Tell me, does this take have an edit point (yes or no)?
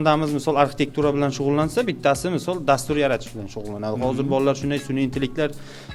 no